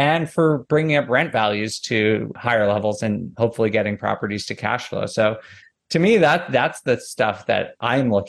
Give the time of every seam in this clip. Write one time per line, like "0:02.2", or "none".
0:02.4